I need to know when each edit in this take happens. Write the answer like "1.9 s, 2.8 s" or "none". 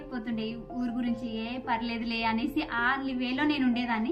none

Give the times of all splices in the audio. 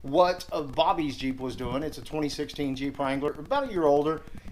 3.3 s

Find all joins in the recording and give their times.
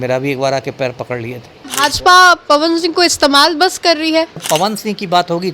1.6 s, 4.4 s

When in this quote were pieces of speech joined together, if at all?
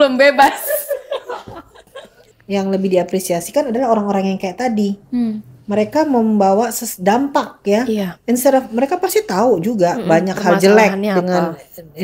1.9 s

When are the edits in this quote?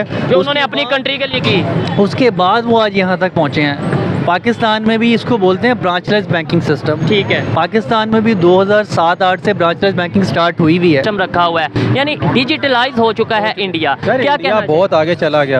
11.0 s

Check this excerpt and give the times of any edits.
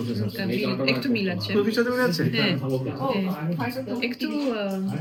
none

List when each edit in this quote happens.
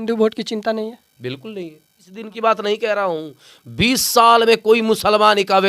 2.3 s

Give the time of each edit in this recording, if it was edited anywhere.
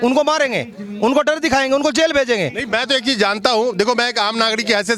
none

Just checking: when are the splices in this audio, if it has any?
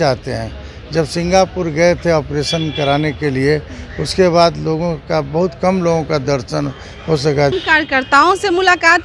7.5 s

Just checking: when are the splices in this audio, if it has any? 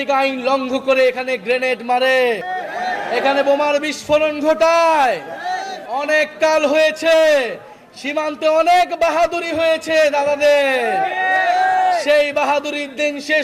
2.5 s

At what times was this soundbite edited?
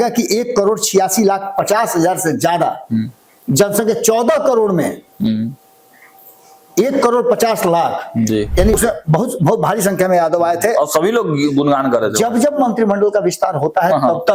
8.7 s

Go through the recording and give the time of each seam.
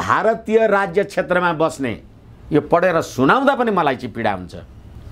none

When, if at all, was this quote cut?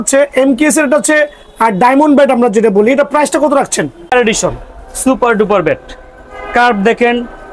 4.1 s

